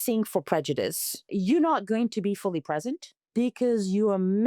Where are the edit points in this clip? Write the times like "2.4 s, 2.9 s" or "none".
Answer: 1.3 s, 3.1 s